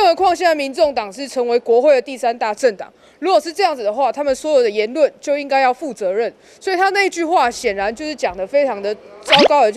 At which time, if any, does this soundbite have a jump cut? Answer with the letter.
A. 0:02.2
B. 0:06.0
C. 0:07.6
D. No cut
D